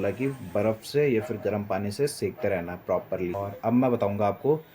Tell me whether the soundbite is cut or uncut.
cut